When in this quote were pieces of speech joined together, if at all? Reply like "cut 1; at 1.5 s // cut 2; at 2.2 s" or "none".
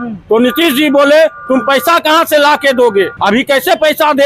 cut 1; at 3.1 s